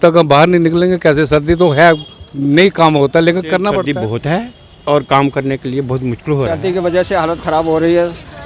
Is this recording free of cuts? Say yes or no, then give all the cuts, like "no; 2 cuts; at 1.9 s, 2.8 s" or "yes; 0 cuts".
no; 2 cuts; at 3.8 s, 6.6 s